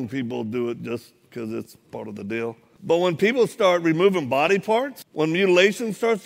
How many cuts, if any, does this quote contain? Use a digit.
2